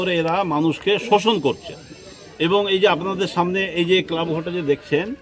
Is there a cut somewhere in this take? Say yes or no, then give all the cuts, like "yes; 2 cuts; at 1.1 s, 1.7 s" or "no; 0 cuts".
no; 0 cuts